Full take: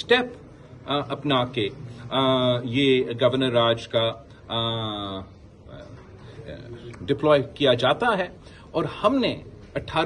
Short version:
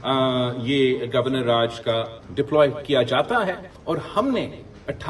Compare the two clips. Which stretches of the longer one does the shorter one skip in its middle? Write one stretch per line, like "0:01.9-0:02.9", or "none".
0:04.3-0:06.9
0:08.4-0:08.6